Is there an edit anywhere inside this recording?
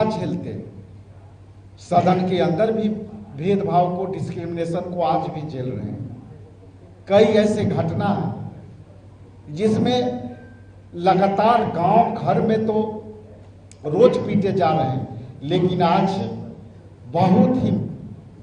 no; 0 cuts

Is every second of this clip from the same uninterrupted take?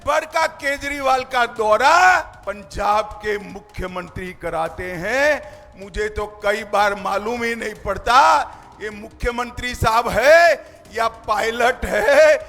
no; 1 cut; at 2.3 s

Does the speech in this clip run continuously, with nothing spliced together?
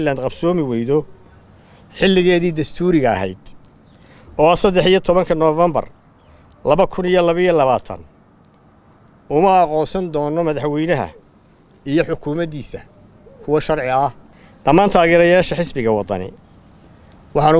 no; 1 cut; at 14.2 s

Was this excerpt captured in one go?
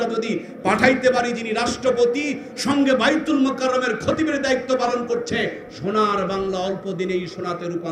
yes; 0 cuts

